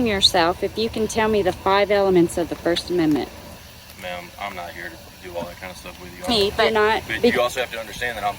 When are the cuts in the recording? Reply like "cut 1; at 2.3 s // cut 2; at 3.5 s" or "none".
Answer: cut 1; at 7.3 s